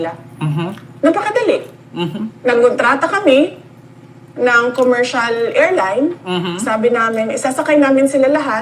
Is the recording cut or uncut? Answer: uncut